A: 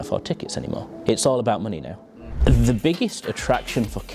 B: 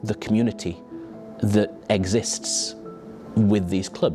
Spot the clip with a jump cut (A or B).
A